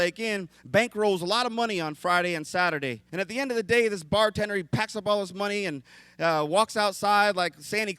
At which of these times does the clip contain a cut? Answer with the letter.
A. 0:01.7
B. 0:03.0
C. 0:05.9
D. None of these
B